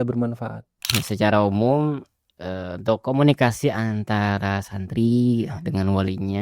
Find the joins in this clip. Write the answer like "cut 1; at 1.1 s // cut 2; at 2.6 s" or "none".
cut 1; at 0.9 s